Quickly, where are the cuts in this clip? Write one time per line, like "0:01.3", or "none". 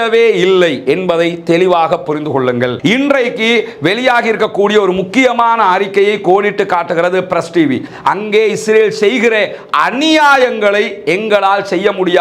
0:02.8
0:07.9

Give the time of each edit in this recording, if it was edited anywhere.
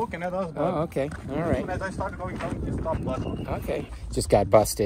0:03.9

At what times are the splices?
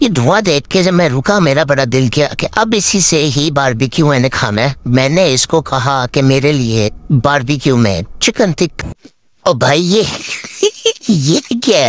0:08.7

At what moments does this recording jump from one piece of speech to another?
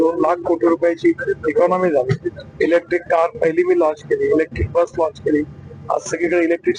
none

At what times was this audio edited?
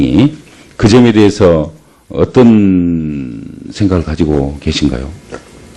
0:04.3

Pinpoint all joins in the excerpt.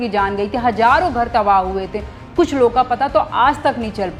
none

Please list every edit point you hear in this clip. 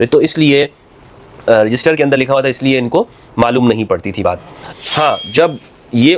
0:04.7

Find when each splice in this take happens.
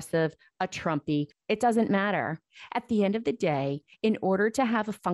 0:01.4

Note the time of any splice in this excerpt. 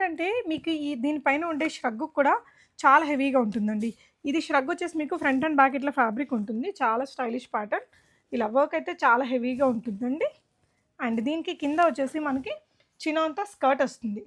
none

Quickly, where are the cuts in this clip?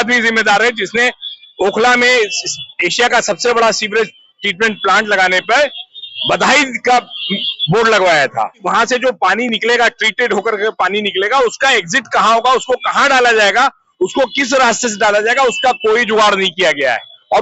0:08.6

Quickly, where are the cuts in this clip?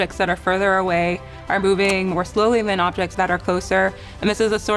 0:03.1

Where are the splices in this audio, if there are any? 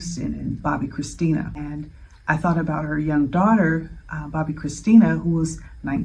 0:01.6

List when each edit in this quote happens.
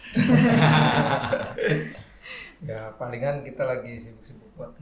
none

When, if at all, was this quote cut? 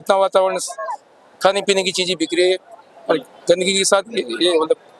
none

